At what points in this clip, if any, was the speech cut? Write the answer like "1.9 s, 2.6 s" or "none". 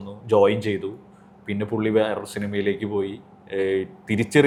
none